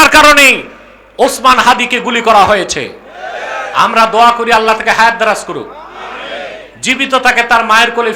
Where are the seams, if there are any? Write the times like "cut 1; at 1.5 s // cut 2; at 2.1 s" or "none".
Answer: none